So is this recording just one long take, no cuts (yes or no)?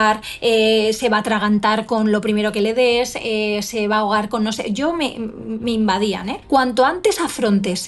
no